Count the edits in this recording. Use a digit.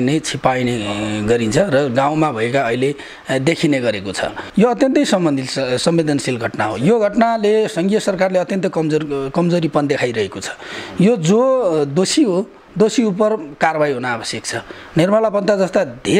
1